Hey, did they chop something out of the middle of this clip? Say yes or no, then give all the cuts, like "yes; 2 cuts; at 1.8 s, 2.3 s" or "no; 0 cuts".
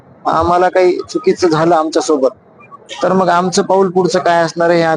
no; 0 cuts